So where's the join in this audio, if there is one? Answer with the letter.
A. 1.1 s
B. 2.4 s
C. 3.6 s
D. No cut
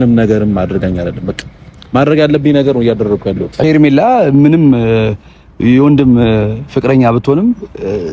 C